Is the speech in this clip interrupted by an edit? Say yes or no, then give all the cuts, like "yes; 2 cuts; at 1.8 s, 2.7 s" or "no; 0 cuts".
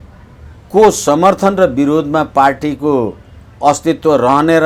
no; 0 cuts